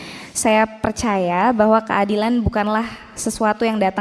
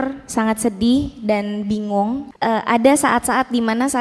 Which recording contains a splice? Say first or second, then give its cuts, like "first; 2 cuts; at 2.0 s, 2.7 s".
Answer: second; 1 cut; at 2.3 s